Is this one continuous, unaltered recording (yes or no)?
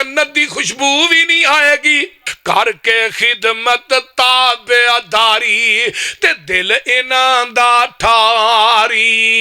no